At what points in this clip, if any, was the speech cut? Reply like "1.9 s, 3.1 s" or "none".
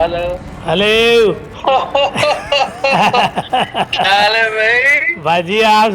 1.5 s